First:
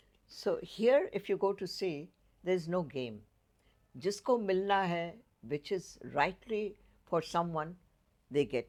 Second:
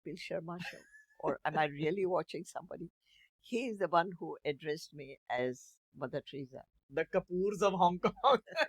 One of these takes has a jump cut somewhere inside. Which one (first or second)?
second